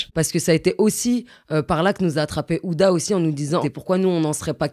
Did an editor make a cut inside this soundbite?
yes; 1 cut; at 3.6 s

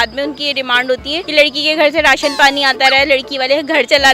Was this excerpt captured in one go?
no; 1 cut; at 1.2 s

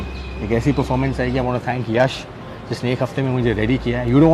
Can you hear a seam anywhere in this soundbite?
no; 0 cuts

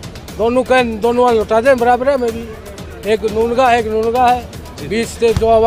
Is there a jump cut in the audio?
no; 0 cuts

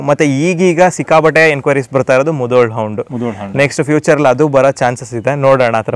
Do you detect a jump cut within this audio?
no; 0 cuts

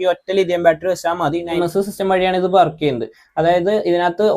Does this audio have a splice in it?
yes; 1 cut; at 1.6 s

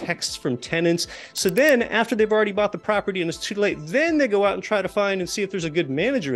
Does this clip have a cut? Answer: no; 0 cuts

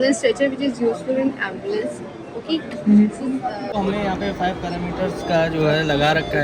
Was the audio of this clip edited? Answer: yes; 1 cut; at 3.7 s

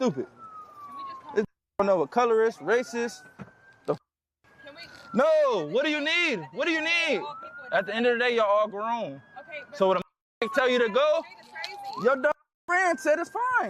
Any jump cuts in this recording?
no; 0 cuts

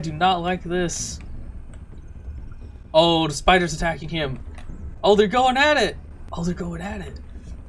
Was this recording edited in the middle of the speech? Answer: yes; 1 cut; at 6.1 s

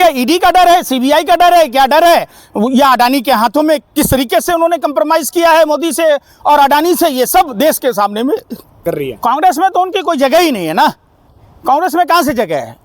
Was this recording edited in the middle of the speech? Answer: yes; 1 cut; at 8.8 s

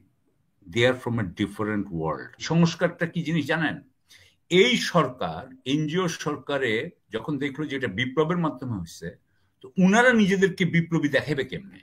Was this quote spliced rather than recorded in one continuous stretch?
yes; 1 cut; at 2.4 s

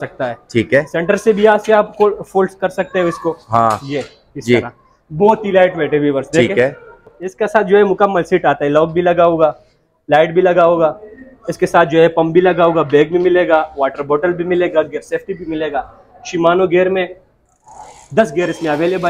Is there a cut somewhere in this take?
yes; 1 cut; at 7.2 s

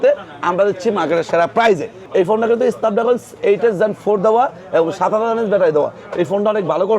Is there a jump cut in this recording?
yes; 1 cut; at 2.0 s

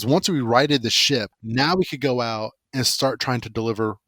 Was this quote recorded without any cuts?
no; 1 cut; at 1.3 s

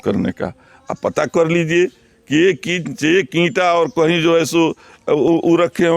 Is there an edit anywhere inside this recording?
no; 0 cuts

